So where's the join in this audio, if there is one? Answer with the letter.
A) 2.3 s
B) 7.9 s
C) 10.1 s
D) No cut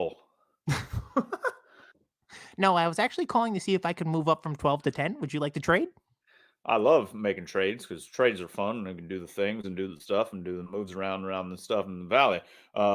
D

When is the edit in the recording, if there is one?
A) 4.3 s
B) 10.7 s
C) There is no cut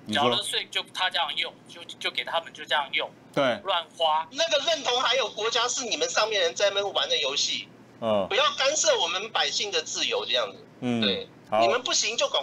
A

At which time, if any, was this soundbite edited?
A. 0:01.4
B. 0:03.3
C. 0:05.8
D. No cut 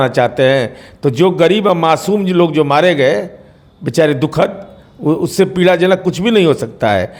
D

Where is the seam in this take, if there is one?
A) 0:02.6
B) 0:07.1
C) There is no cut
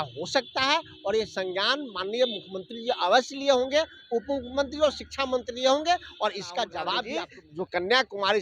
B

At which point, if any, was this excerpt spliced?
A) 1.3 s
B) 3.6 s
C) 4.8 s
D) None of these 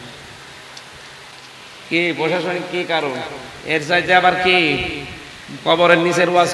A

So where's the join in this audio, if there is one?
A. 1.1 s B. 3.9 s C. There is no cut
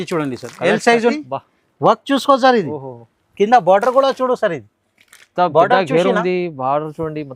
A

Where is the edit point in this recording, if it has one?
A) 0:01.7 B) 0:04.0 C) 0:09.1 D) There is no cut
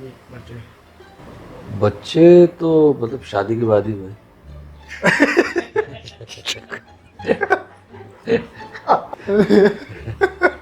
C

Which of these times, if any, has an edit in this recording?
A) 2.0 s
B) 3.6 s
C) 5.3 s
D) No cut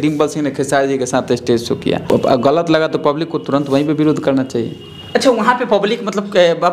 A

